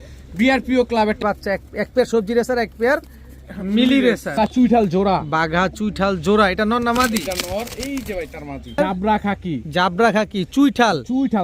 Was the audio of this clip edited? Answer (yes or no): yes